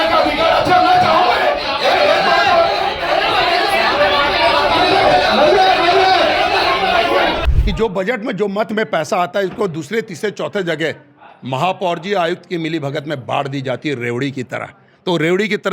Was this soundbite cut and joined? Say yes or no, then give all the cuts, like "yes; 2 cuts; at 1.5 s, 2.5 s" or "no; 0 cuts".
yes; 1 cut; at 7.4 s